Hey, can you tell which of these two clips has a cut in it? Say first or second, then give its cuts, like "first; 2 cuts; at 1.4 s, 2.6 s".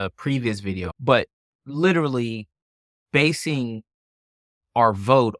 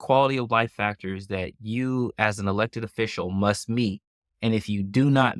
first; 1 cut; at 0.9 s